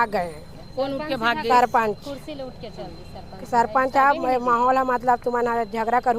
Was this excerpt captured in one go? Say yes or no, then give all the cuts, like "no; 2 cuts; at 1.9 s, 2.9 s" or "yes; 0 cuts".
yes; 0 cuts